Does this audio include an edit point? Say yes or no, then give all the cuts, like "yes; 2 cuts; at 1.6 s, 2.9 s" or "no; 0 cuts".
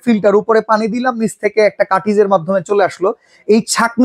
no; 0 cuts